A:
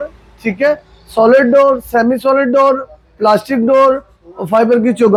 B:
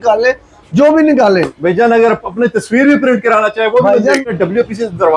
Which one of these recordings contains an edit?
B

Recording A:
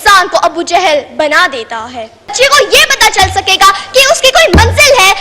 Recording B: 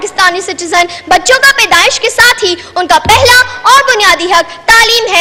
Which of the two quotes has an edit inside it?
A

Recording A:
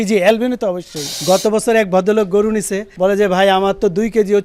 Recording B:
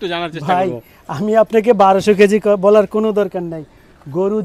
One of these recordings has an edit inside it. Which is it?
A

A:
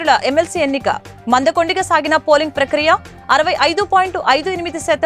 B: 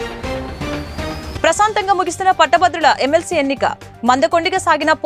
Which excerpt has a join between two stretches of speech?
B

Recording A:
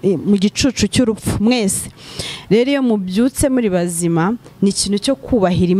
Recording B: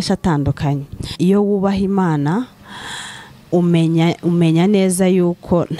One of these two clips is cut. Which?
B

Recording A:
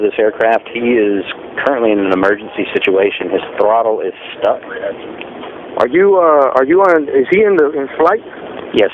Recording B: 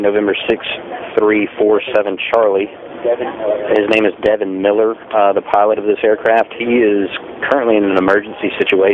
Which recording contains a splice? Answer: A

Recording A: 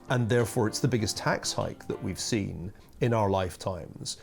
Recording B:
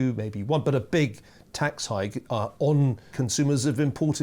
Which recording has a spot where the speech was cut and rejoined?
B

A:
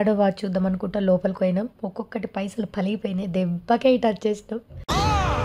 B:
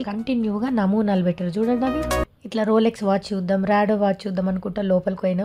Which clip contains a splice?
B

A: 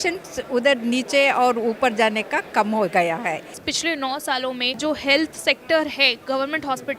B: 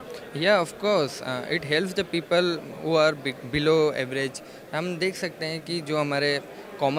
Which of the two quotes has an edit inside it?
A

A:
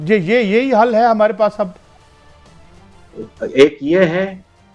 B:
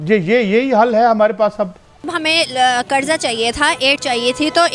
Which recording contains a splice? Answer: B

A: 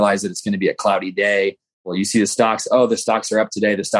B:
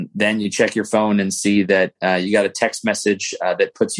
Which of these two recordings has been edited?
A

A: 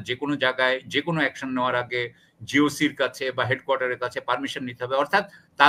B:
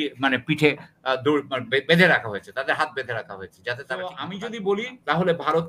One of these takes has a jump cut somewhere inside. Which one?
B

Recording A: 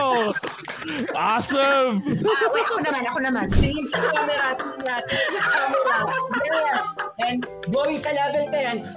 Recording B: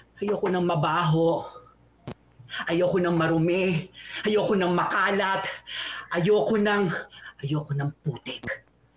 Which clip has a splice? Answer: A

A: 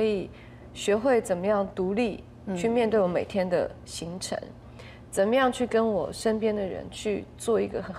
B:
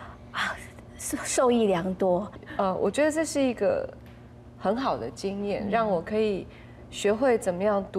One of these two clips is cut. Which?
B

